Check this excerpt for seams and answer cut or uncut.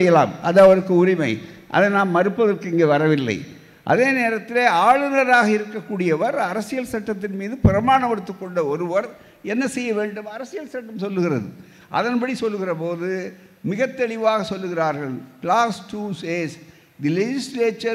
uncut